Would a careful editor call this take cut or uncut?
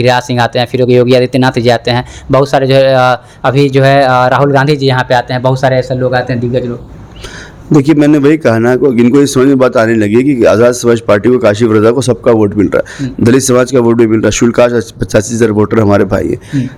uncut